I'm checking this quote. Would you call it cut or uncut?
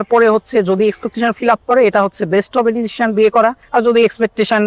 cut